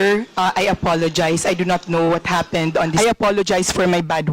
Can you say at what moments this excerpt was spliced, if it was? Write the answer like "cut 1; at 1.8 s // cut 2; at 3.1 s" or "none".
cut 1; at 2.9 s